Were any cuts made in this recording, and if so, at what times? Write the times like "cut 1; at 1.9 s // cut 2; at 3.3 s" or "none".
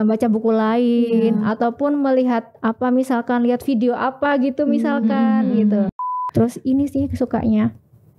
cut 1; at 5.9 s